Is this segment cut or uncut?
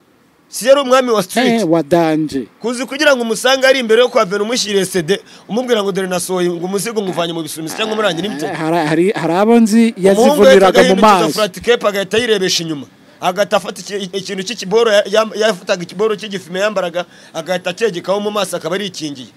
uncut